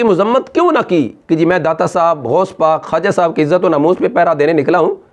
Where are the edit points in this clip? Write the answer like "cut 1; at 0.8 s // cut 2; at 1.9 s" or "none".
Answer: cut 1; at 1.2 s